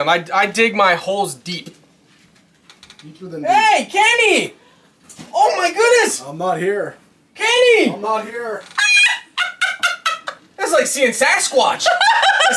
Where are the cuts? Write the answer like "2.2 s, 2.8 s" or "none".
none